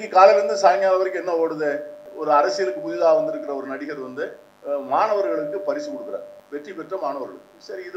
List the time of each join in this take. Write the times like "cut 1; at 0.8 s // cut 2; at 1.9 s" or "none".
cut 1; at 2.1 s // cut 2; at 4.5 s // cut 3; at 6.4 s